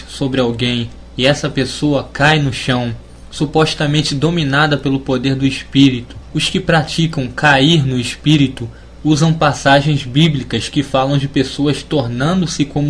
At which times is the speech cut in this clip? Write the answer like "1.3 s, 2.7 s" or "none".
none